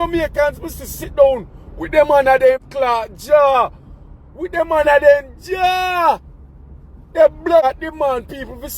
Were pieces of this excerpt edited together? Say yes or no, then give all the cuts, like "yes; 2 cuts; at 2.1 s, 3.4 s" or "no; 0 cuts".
yes; 2 cuts; at 2.7 s, 7.6 s